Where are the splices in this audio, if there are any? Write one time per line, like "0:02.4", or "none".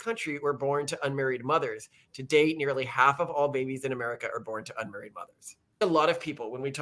0:05.8